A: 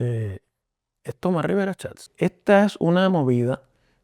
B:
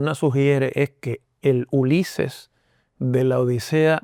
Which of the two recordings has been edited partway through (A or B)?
A